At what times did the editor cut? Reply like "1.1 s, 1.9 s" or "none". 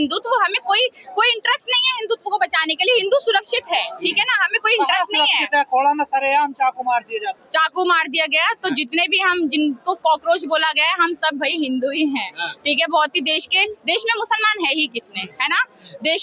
none